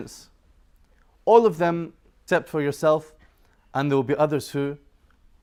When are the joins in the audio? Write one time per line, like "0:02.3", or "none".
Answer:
none